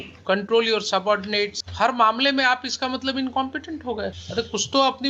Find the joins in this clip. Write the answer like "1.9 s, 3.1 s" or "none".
1.6 s, 4.2 s